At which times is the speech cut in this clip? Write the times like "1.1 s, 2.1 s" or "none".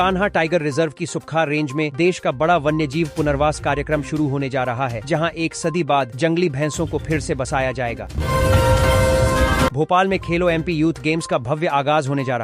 8.1 s, 9.7 s